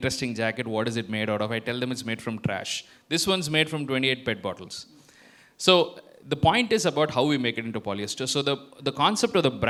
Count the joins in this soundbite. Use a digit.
0